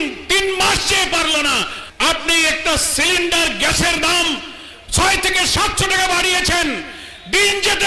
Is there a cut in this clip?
yes; 1 cut; at 1.8 s

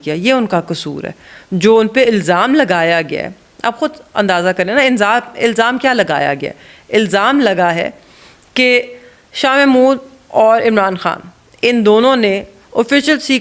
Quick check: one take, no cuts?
yes; 0 cuts

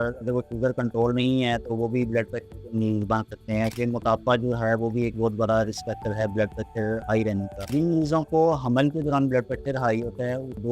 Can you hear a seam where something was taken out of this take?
yes; 1 cut; at 3.7 s

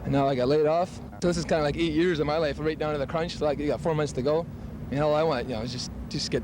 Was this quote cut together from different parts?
yes; 1 cut; at 1.0 s

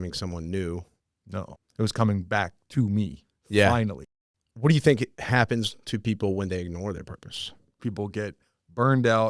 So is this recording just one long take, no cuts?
no; 4 cuts; at 1.4 s, 4.0 s, 5.2 s, 7.8 s

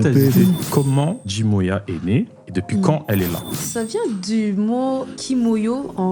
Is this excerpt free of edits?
no; 3 cuts; at 0.9 s, 3.6 s, 5.1 s

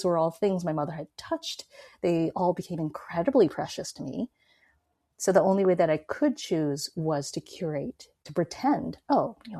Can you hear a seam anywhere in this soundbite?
yes; 1 cut; at 8.2 s

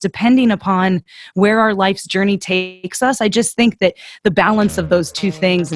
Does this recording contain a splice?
no; 0 cuts

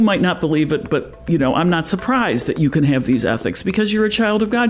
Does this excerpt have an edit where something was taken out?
no; 0 cuts

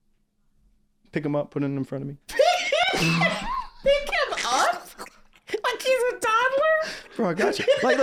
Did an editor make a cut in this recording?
no; 0 cuts

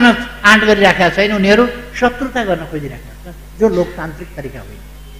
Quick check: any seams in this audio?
no; 0 cuts

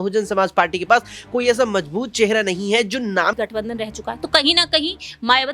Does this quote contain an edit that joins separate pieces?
yes; 1 cut; at 3.3 s

